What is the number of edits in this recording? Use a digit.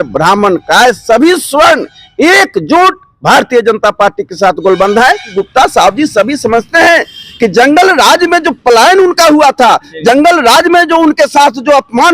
1